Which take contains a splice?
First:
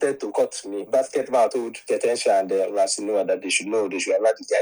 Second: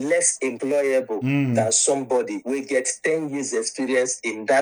first; 2 cuts; at 0.8 s, 2.6 s

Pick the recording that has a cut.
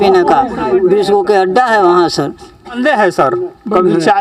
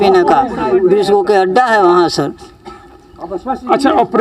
first; 1 cut; at 2.8 s

